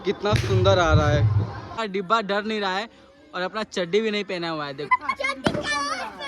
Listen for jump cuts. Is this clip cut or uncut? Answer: cut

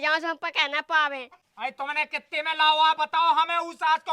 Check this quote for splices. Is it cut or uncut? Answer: cut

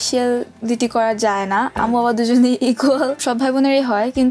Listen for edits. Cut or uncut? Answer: cut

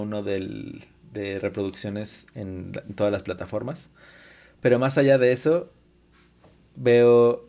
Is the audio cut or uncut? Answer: uncut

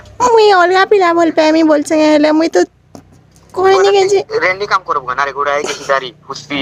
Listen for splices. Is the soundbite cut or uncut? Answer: uncut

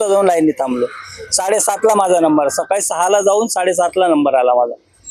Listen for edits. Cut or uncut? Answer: uncut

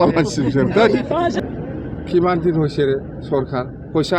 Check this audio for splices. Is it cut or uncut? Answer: cut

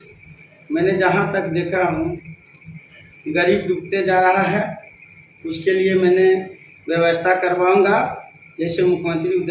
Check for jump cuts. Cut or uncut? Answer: uncut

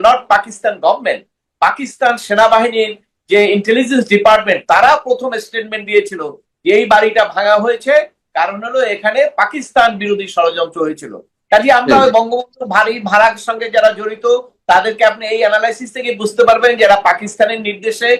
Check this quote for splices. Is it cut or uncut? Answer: uncut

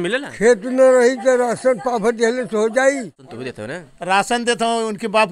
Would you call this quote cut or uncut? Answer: cut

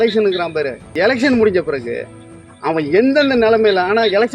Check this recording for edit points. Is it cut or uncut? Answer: cut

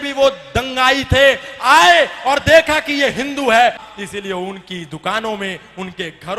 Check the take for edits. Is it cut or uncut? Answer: cut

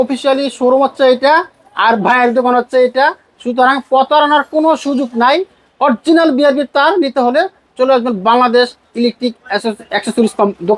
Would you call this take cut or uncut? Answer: uncut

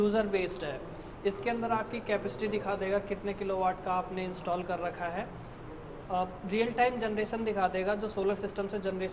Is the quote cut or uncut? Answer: uncut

